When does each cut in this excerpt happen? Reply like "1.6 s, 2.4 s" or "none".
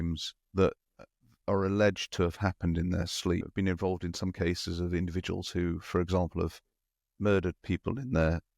3.5 s